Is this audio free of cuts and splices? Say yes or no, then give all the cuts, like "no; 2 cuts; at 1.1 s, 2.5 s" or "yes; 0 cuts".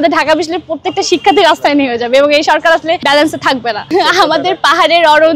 no; 1 cut; at 3.9 s